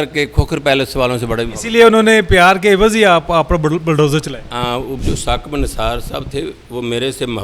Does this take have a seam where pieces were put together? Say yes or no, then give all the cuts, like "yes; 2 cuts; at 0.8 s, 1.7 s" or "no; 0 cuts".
yes; 1 cut; at 4.9 s